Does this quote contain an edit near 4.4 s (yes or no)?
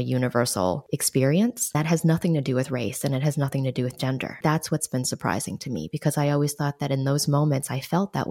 yes